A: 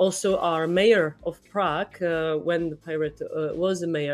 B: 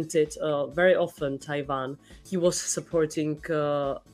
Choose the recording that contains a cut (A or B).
B